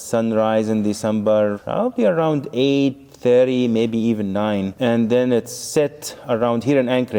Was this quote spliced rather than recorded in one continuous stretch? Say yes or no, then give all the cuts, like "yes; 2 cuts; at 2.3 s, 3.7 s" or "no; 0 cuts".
no; 0 cuts